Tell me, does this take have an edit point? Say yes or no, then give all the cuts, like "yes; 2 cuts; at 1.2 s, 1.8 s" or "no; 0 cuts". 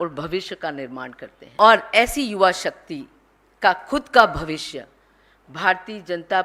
yes; 1 cut; at 1.4 s